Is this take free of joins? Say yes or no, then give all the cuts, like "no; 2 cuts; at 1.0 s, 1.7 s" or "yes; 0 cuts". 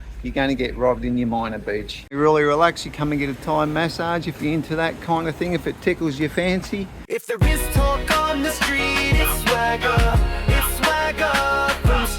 no; 2 cuts; at 2.0 s, 6.9 s